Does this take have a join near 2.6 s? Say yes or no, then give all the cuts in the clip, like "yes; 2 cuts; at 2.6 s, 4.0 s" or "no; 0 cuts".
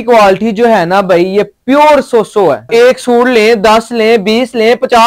yes; 1 cut; at 2.6 s